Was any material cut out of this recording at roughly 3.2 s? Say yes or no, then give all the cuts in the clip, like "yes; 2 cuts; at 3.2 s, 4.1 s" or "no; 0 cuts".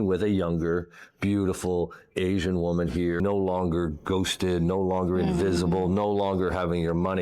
yes; 1 cut; at 3.2 s